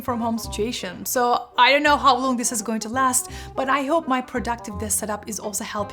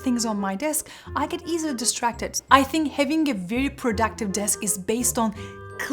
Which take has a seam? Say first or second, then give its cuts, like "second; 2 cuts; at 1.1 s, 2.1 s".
second; 1 cut; at 2.4 s